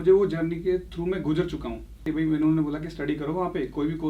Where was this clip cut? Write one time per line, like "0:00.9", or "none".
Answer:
0:02.0